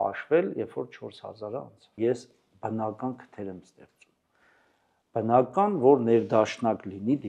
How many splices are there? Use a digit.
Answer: 1